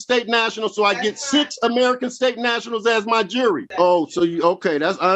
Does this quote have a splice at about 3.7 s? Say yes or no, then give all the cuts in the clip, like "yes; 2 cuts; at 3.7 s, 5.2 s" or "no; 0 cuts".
yes; 1 cut; at 3.7 s